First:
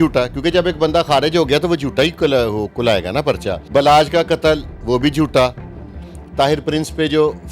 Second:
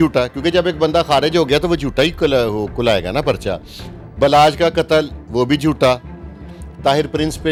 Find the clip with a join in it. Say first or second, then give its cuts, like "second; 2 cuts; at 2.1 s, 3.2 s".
first; 1 cut; at 3.5 s